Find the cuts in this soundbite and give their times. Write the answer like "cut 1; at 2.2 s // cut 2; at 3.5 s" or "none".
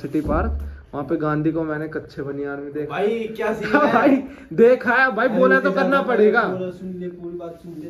none